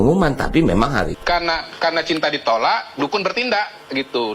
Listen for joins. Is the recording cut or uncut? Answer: cut